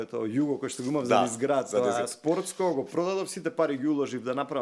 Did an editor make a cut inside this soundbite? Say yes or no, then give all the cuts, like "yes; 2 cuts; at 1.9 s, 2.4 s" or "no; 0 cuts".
no; 0 cuts